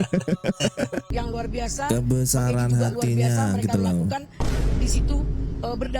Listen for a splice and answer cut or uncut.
cut